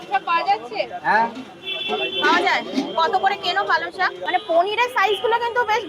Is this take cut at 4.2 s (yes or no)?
yes